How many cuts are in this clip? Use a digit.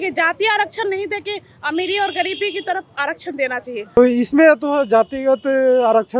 1